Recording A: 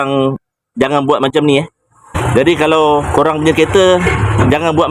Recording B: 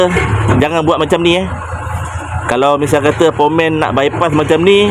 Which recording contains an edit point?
A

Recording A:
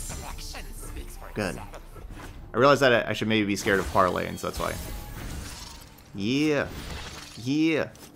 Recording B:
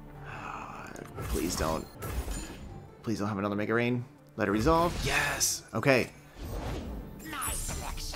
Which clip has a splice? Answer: B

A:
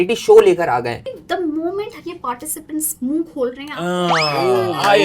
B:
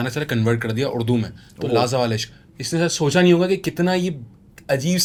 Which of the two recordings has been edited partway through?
A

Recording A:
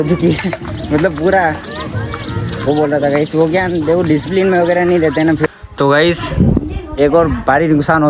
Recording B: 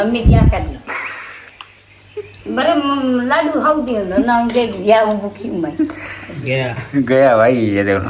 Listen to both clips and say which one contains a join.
A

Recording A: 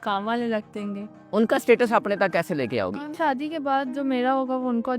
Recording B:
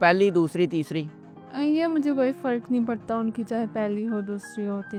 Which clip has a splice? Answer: A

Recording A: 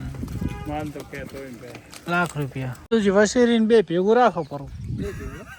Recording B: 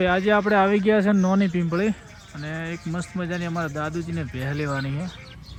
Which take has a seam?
A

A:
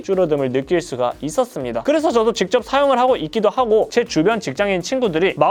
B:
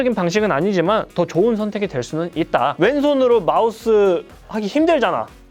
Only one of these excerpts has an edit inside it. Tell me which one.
B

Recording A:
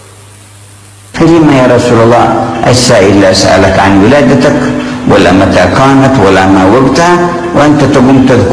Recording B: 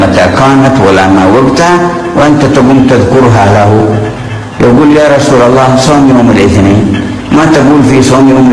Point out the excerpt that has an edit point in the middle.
A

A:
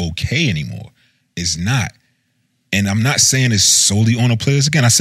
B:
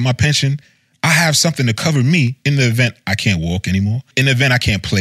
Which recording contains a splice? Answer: B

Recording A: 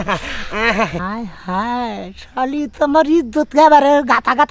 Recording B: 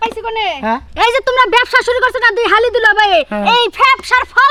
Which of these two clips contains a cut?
A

